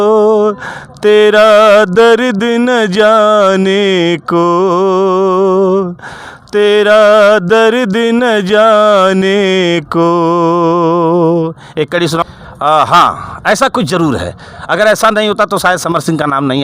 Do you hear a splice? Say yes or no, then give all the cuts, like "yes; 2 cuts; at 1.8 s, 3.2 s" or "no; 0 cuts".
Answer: yes; 1 cut; at 12.2 s